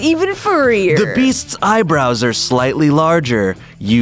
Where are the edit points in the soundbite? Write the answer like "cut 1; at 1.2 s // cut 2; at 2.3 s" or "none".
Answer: none